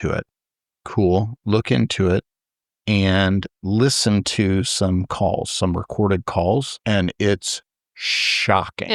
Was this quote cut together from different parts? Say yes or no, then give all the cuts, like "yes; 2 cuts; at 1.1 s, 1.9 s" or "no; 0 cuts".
yes; 1 cut; at 6.7 s